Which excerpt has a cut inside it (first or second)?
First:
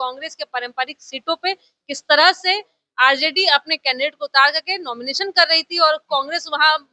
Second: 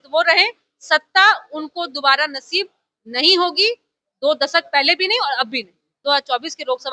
second